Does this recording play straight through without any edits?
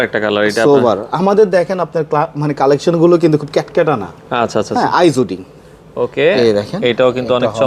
yes; 0 cuts

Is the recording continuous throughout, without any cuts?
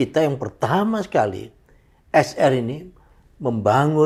yes; 0 cuts

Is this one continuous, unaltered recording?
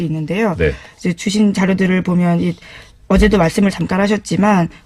no; 1 cut; at 1.6 s

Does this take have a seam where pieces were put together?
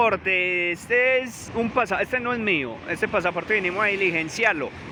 no; 0 cuts

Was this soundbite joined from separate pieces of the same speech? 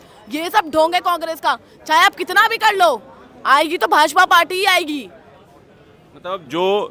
no; 0 cuts

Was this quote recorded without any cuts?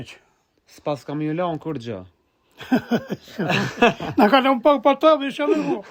yes; 0 cuts

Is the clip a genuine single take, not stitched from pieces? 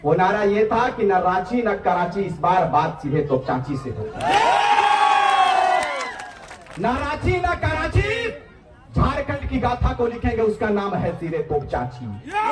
yes; 0 cuts

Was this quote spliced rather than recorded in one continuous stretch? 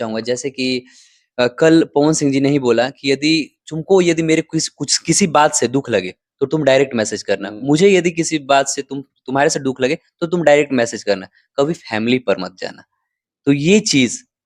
no; 0 cuts

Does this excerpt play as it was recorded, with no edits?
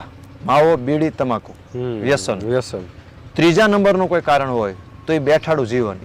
yes; 0 cuts

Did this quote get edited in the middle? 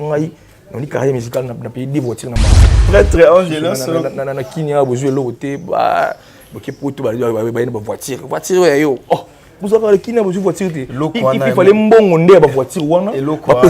yes; 1 cut; at 2.7 s

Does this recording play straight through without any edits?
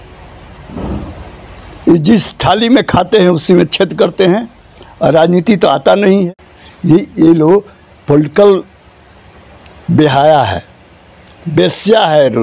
no; 1 cut; at 6.4 s

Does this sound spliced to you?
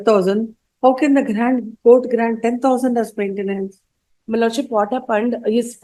no; 0 cuts

